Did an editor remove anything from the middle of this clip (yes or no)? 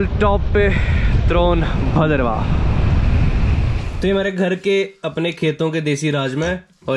yes